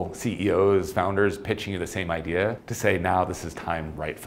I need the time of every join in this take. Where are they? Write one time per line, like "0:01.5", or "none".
none